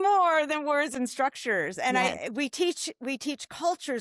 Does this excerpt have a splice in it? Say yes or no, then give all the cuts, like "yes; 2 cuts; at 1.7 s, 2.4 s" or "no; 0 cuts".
yes; 1 cut; at 0.9 s